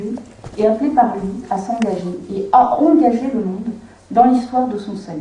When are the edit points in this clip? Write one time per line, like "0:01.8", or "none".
0:03.5